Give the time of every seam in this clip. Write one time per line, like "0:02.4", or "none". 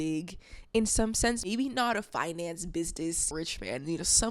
0:01.5
0:03.3